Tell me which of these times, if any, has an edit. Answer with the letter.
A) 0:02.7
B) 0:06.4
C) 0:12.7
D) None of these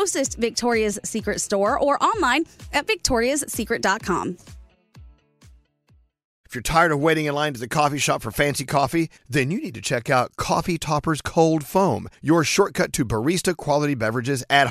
B